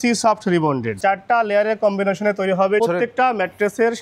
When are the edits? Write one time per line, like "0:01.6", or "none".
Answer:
0:01.0
0:02.8